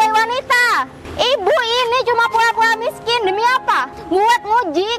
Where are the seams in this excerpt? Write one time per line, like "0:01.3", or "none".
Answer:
0:01.0
0:03.9